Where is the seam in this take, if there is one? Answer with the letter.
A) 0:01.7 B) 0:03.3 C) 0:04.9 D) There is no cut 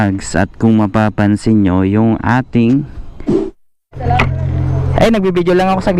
B